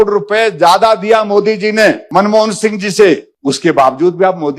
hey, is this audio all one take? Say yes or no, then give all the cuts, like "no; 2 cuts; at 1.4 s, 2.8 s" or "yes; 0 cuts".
no; 2 cuts; at 2.0 s, 3.3 s